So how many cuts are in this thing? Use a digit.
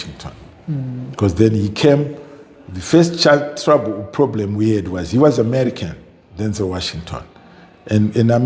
0